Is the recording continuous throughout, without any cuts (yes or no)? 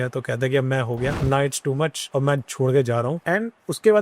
no